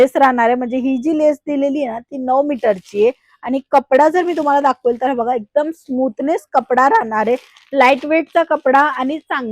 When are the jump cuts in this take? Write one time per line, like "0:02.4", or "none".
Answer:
none